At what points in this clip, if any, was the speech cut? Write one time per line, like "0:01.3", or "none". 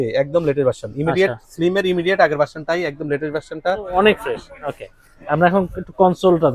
0:03.9